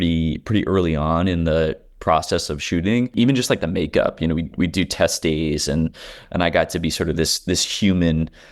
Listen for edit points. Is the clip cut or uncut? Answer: cut